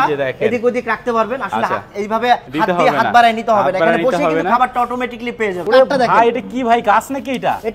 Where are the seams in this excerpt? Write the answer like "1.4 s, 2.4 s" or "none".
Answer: 2.5 s, 5.6 s